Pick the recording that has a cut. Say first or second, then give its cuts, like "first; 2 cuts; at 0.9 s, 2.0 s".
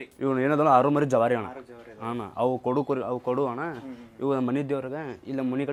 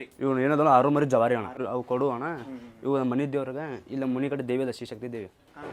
second; 1 cut; at 1.6 s